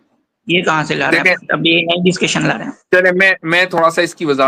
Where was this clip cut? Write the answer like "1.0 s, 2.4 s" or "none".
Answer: none